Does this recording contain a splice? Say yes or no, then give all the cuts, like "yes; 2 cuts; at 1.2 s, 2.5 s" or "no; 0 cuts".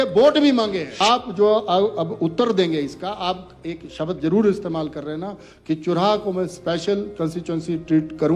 yes; 1 cut; at 0.9 s